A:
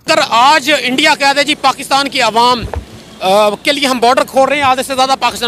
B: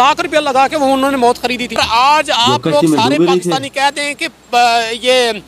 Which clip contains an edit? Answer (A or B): B